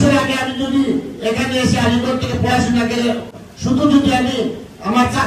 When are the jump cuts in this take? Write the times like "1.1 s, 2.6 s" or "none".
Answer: 3.3 s